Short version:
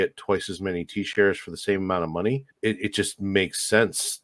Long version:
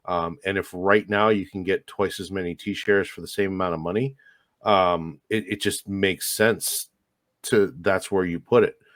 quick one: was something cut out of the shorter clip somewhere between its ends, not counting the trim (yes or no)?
yes